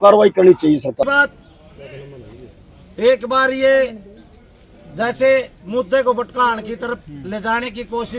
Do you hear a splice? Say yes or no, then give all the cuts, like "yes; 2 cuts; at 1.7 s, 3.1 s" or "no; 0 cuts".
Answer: yes; 1 cut; at 1.0 s